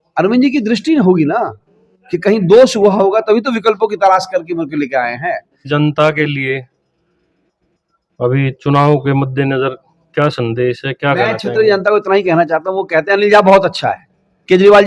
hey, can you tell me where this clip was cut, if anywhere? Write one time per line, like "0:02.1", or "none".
0:05.6